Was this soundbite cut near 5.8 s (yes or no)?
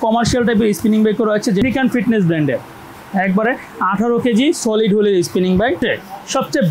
yes